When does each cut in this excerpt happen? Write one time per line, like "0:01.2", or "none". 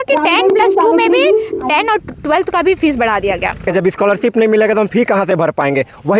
0:03.6